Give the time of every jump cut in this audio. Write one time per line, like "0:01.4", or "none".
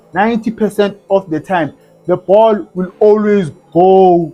none